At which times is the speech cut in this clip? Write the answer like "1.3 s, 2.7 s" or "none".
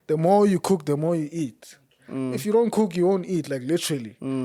none

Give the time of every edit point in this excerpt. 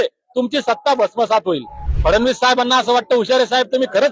1.9 s

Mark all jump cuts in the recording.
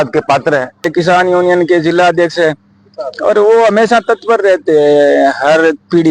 0.9 s

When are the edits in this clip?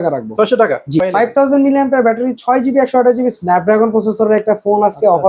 1.0 s

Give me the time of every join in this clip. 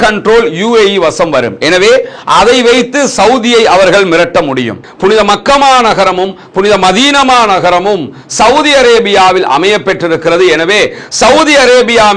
4.9 s

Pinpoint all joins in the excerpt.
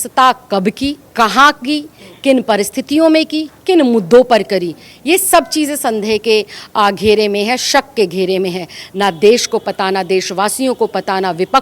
1.0 s

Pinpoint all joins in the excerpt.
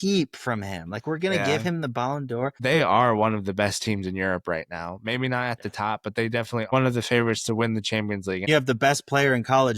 2.6 s, 6.7 s, 8.5 s

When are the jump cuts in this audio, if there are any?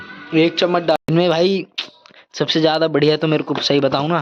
1.0 s

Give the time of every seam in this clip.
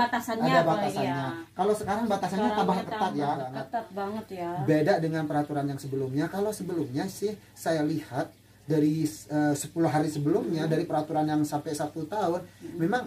3.6 s

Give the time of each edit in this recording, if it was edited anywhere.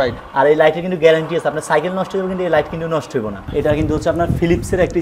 3.4 s

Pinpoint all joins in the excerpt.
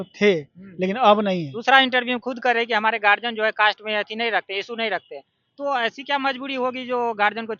1.5 s

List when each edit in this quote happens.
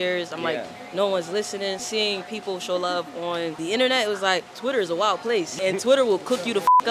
1.8 s, 3.6 s, 4.5 s, 5.5 s

